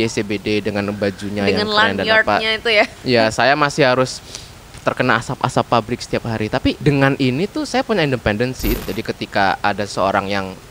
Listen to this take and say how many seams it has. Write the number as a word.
two